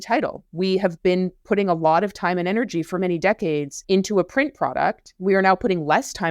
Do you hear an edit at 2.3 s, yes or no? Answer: no